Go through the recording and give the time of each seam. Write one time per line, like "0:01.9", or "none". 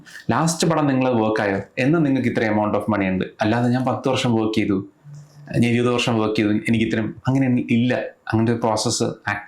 none